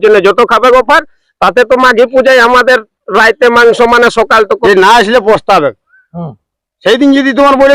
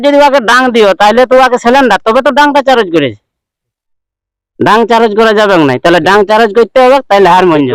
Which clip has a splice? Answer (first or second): first